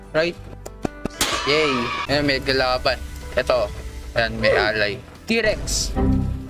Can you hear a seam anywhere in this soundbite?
yes; 1 cut; at 2.0 s

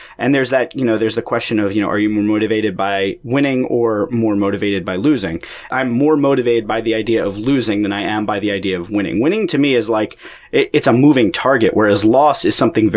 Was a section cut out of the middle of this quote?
yes; 1 cut; at 5.7 s

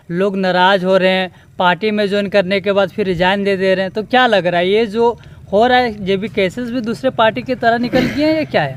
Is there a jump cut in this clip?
no; 0 cuts

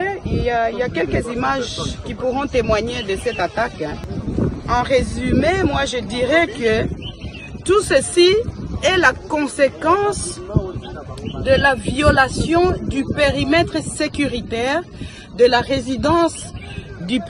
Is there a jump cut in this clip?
yes; 1 cut; at 4.1 s

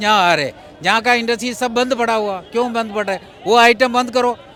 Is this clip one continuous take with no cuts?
yes; 0 cuts

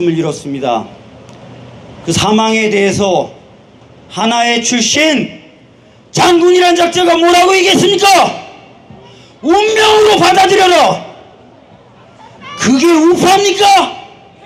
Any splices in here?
no; 0 cuts

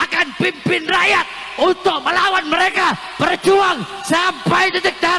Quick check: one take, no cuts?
yes; 0 cuts

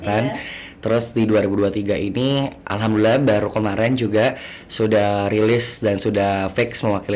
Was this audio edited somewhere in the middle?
no; 0 cuts

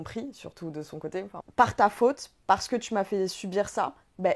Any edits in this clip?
yes; 1 cut; at 1.4 s

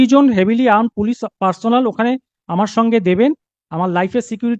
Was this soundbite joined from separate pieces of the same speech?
no; 0 cuts

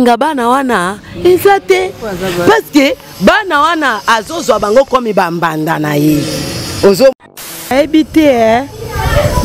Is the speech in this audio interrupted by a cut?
yes; 1 cut; at 7.7 s

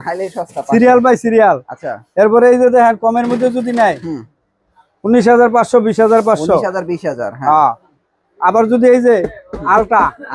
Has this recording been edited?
no; 0 cuts

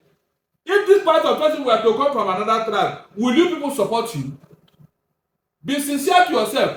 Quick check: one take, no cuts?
yes; 0 cuts

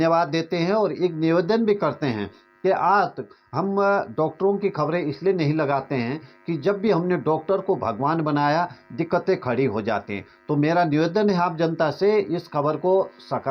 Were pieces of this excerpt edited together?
no; 0 cuts

